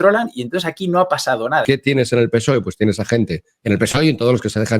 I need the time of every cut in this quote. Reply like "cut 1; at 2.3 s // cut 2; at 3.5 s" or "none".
cut 1; at 1.6 s